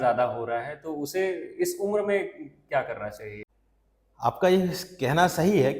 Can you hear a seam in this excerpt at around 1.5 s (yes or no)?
no